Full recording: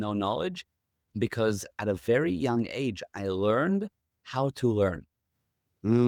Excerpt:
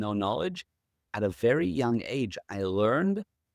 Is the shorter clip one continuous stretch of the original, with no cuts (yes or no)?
no